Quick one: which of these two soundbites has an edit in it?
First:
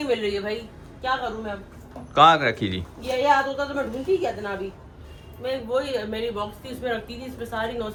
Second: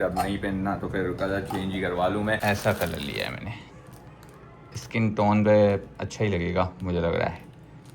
second; 1 cut; at 2.4 s

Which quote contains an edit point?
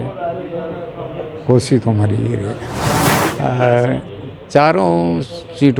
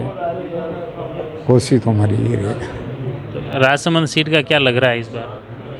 first; 1 cut; at 3.1 s

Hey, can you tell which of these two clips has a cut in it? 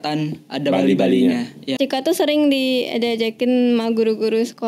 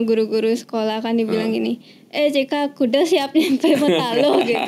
first; 1 cut; at 1.6 s

